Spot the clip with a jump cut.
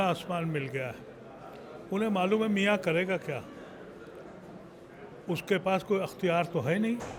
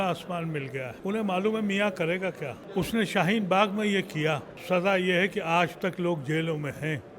second; 3 cuts; at 0.9 s, 2.5 s, 4.5 s

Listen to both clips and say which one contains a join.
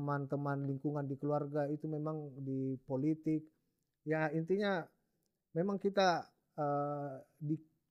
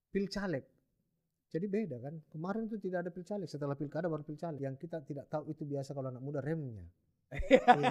second; 1 cut; at 4.6 s

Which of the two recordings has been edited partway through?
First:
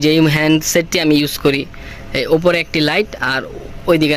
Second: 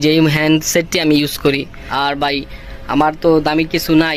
second; 1 cut; at 1.8 s

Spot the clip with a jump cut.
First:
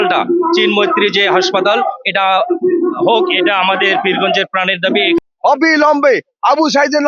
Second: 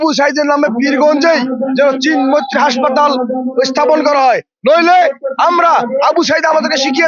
first; 1 cut; at 5.2 s

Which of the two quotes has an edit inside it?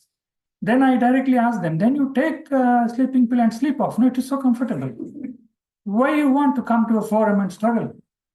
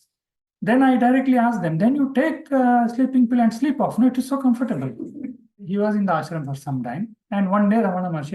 second; 1 cut; at 5.6 s

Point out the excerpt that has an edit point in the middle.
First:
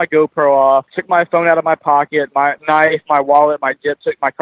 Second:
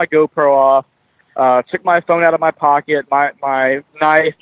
first; 2 cuts; at 1.0 s, 2.6 s

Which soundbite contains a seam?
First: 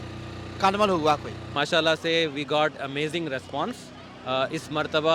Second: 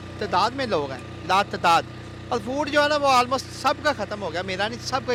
first; 1 cut; at 1.5 s

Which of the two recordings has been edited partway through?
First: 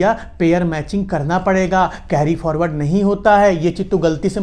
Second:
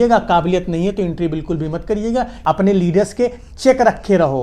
second; 1 cut; at 2.3 s

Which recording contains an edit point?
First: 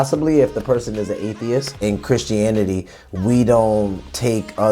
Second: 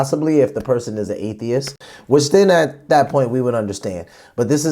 first; 1 cut; at 1.7 s

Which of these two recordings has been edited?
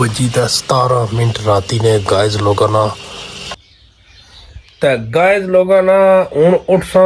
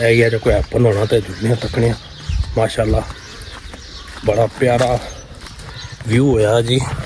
first; 1 cut; at 3.5 s

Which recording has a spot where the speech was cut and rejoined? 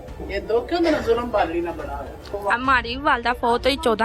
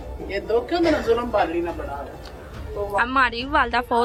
first; 1 cut; at 2.2 s

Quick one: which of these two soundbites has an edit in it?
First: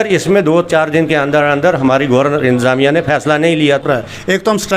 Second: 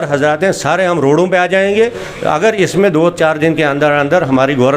first; 1 cut; at 3.8 s

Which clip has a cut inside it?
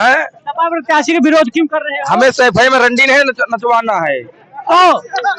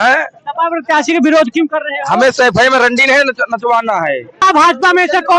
second; 1 cut; at 4.4 s

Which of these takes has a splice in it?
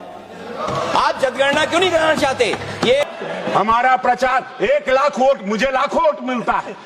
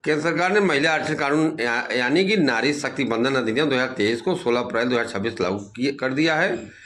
first; 1 cut; at 3.0 s

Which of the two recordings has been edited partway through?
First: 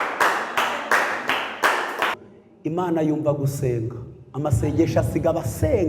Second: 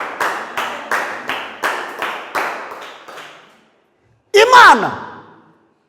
first; 1 cut; at 2.2 s

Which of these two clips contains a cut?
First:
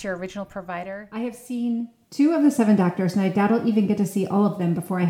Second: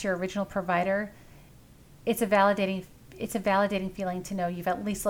first; 1 cut; at 0.9 s

